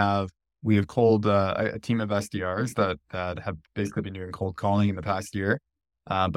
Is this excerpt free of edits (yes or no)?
yes